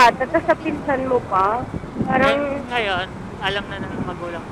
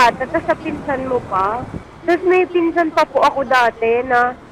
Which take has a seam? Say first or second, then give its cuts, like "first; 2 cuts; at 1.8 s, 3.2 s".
second; 1 cut; at 1.8 s